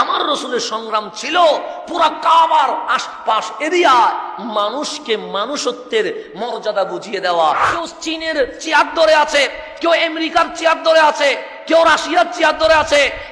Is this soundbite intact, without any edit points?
no; 1 cut; at 7.7 s

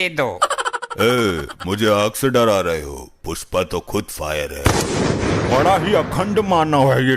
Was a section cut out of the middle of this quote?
no; 0 cuts

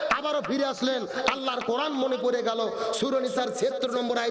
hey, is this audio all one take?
yes; 0 cuts

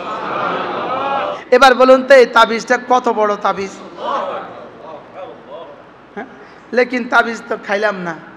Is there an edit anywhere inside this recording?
yes; 1 cut; at 1.4 s

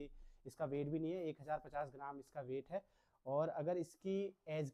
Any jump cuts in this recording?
no; 0 cuts

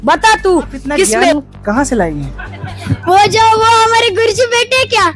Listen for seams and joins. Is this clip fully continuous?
no; 1 cut; at 1.3 s

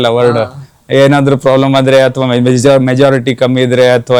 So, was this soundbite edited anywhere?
no; 0 cuts

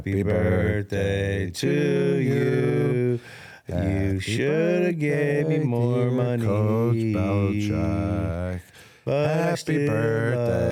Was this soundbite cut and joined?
no; 0 cuts

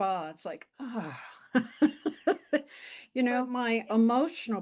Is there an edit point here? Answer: yes; 1 cut; at 3.5 s

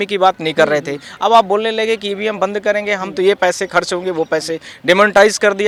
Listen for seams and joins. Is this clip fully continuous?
yes; 0 cuts

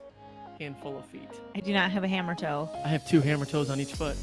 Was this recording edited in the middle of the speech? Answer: yes; 1 cut; at 2.8 s

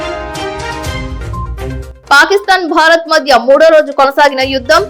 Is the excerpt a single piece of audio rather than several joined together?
no; 1 cut; at 1.9 s

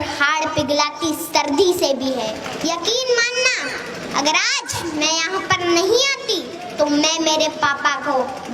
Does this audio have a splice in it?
yes; 1 cut; at 2.5 s

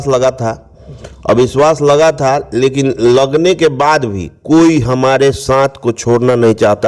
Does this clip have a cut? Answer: no; 0 cuts

